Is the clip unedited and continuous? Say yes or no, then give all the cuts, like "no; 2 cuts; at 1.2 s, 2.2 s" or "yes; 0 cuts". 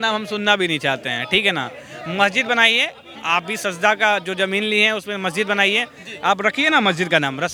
yes; 0 cuts